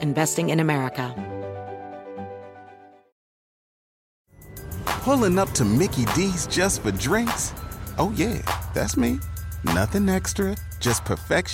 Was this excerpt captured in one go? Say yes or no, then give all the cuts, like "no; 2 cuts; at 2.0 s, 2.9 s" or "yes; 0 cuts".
no; 1 cut; at 1.1 s